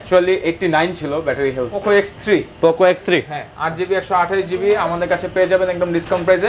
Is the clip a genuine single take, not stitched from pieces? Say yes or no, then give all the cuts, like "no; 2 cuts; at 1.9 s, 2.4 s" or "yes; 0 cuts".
no; 1 cut; at 1.8 s